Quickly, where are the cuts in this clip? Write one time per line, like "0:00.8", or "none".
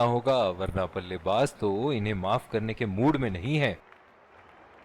0:03.8